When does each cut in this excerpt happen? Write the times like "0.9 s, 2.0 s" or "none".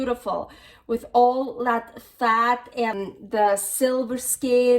3.1 s